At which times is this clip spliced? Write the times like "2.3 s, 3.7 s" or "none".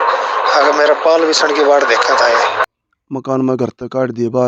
2.7 s